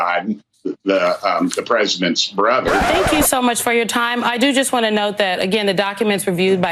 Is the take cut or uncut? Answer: cut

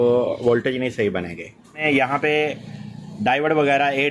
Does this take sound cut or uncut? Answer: cut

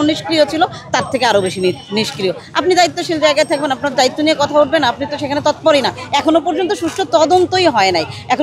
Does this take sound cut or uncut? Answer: uncut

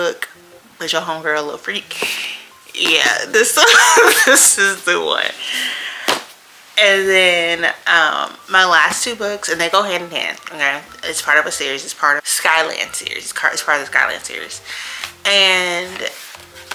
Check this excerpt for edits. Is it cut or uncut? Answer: uncut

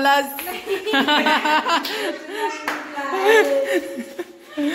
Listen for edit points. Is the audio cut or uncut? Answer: uncut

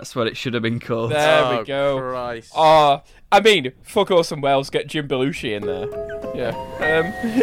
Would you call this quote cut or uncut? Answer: uncut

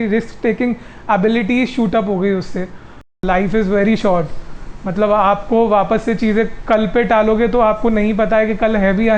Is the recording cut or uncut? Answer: cut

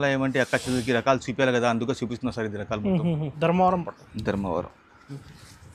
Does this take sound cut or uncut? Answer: cut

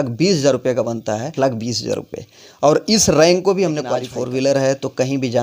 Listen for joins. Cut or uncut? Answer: cut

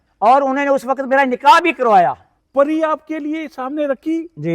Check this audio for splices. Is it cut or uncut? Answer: cut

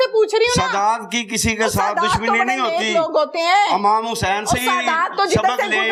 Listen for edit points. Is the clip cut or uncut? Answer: uncut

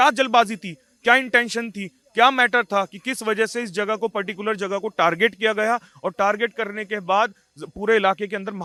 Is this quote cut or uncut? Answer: uncut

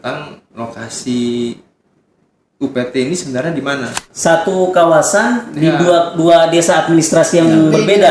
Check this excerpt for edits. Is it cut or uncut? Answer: cut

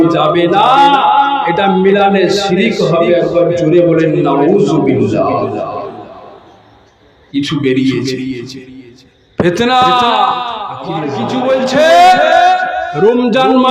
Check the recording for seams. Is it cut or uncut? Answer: cut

